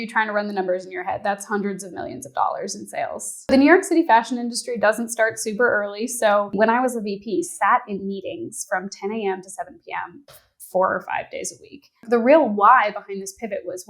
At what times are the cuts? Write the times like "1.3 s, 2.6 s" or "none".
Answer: 3.5 s, 6.5 s, 12.0 s